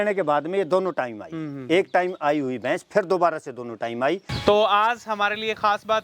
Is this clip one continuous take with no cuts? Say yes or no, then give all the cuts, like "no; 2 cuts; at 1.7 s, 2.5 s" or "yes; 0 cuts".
no; 1 cut; at 4.3 s